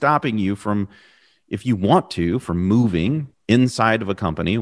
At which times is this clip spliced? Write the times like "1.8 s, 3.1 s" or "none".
3.3 s